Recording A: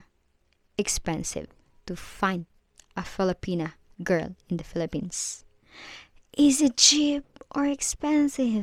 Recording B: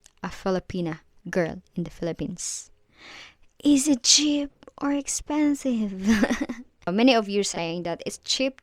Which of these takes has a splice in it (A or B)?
B